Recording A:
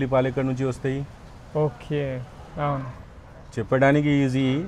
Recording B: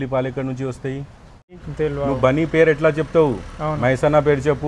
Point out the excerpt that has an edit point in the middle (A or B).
B